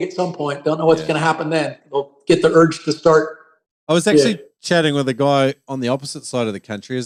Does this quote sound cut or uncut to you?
uncut